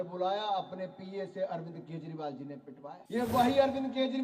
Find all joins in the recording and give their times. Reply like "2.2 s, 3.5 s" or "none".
3.0 s

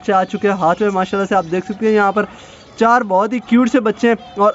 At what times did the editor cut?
none

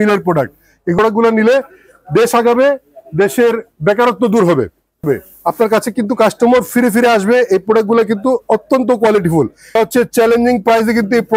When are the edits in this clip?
1.0 s, 5.0 s, 9.8 s

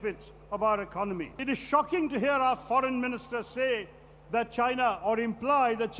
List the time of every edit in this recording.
1.3 s

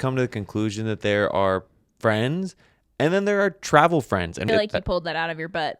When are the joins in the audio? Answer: 4.5 s

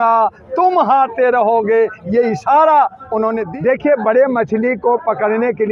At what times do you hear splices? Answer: 3.4 s

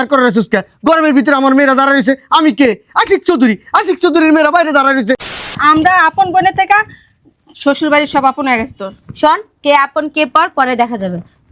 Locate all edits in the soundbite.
5.5 s

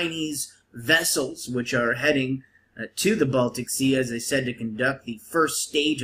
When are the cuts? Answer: none

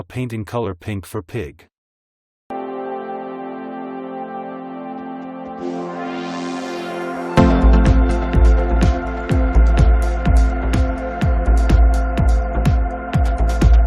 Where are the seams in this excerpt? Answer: 2.5 s

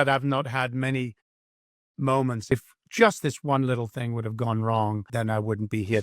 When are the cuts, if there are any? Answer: 2.5 s, 5.0 s

